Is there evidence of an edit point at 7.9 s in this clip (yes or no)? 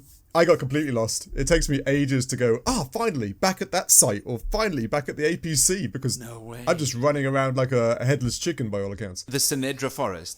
no